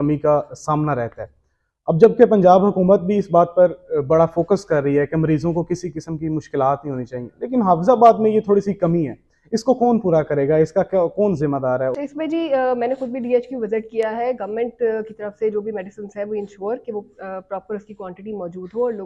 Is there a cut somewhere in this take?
no; 0 cuts

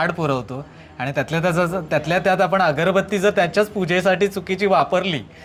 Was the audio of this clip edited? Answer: no; 0 cuts

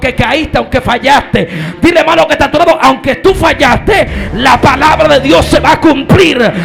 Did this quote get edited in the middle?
no; 0 cuts

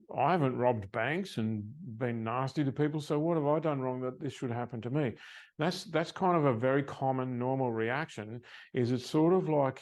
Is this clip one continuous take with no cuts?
yes; 0 cuts

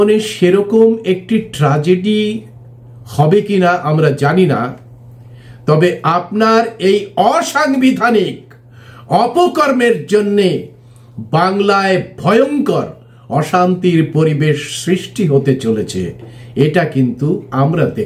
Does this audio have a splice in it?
no; 0 cuts

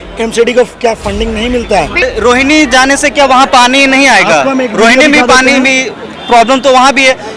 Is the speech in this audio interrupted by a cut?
yes; 1 cut; at 2.0 s

